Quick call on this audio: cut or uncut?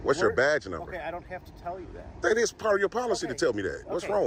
uncut